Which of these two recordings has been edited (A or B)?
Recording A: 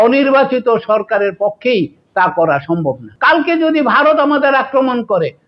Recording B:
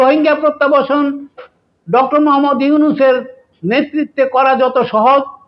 A